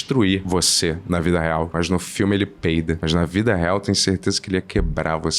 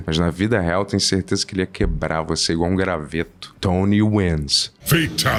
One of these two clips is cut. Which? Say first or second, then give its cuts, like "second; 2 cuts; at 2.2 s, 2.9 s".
first; 1 cut; at 1.7 s